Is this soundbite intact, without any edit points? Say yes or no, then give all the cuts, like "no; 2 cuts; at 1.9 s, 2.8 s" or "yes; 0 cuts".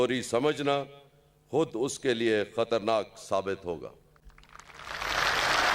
yes; 0 cuts